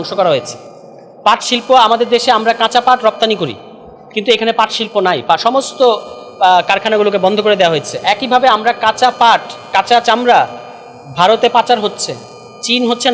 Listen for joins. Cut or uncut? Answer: uncut